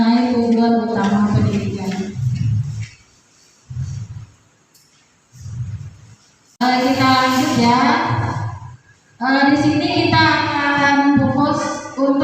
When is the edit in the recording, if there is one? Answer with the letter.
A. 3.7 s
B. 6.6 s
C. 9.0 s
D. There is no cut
B